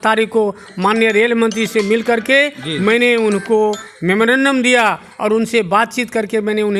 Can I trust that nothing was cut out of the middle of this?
yes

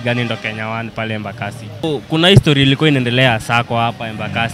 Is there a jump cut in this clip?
yes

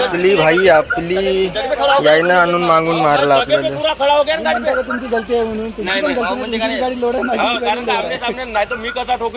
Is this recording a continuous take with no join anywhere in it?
yes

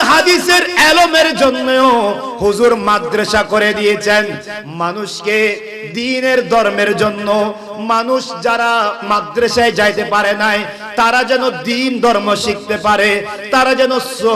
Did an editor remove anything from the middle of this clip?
yes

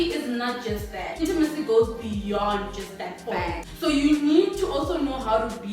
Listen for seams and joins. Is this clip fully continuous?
no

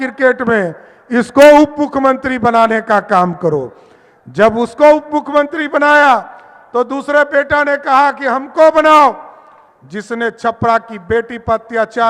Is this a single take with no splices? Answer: yes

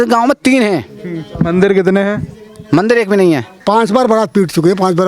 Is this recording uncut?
no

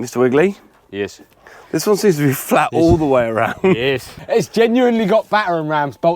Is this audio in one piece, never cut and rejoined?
no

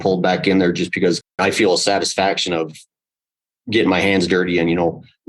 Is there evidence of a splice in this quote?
yes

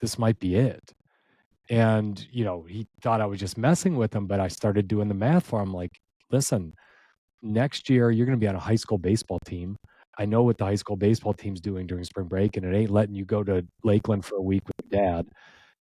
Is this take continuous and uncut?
yes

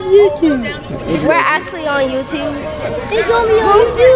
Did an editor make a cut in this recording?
yes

